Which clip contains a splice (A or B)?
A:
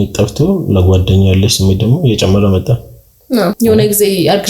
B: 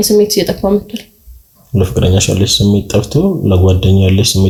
A